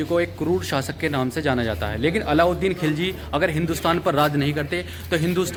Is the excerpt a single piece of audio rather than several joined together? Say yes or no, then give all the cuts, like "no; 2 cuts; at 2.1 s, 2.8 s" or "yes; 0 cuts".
yes; 0 cuts